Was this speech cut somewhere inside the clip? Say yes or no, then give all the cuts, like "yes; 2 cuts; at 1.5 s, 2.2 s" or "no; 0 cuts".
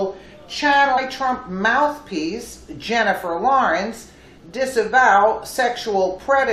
no; 0 cuts